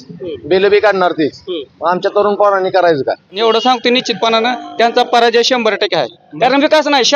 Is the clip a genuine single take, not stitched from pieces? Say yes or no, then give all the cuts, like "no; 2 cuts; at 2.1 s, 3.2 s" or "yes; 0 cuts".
no; 2 cuts; at 3.4 s, 6.2 s